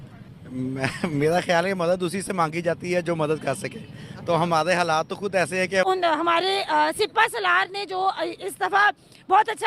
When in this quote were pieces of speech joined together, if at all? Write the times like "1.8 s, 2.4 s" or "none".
5.9 s